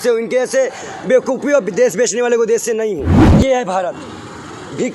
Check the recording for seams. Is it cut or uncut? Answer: cut